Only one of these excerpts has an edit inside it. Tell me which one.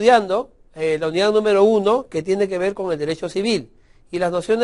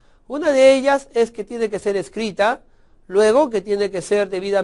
second; 1 cut; at 3.3 s

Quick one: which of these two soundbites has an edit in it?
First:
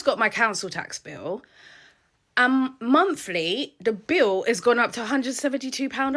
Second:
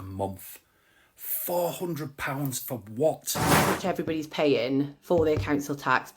second; 1 cut; at 3.8 s

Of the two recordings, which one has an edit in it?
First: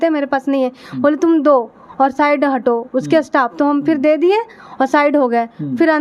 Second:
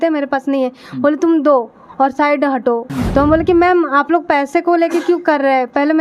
second; 1 cut; at 2.8 s

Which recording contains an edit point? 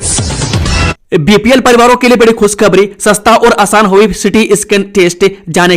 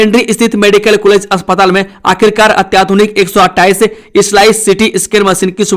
first; 1 cut; at 1.0 s

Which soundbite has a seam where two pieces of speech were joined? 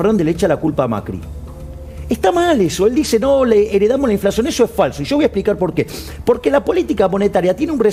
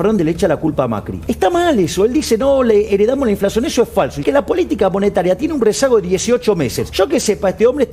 second; 3 cuts; at 1.1 s, 4.2 s, 6.8 s

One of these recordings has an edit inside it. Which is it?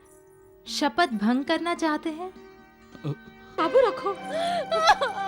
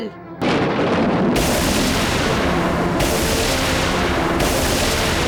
first; 1 cut; at 3.6 s

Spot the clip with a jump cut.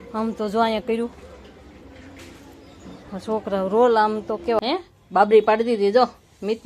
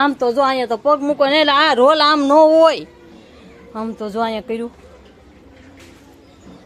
first; 1 cut; at 4.6 s

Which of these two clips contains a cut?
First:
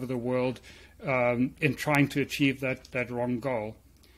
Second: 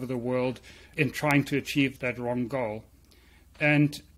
second; 2 cuts; at 0.9 s, 1.9 s

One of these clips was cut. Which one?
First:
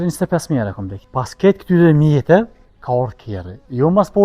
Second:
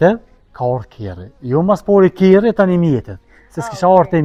first; 1 cut; at 0.9 s

